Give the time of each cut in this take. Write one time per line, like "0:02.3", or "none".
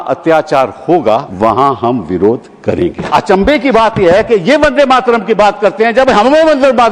0:01.3
0:03.1